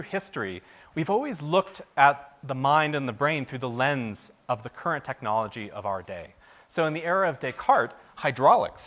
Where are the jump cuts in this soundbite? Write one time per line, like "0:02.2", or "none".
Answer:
0:03.0